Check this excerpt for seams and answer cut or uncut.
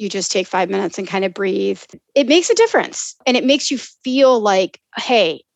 cut